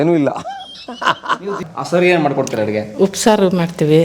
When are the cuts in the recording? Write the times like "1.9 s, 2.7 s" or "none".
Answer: 1.5 s